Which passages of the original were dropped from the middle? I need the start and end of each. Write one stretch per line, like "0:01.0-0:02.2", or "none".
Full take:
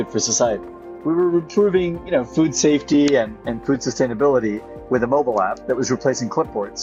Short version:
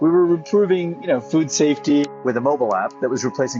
0:03.1-0:04.7